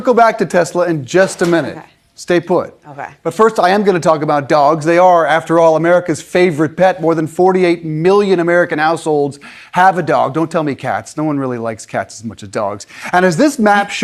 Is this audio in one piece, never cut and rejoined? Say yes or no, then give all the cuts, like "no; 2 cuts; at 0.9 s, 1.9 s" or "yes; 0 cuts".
yes; 0 cuts